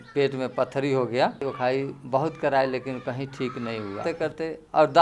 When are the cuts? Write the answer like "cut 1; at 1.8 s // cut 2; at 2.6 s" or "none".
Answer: cut 1; at 1.4 s // cut 2; at 4.0 s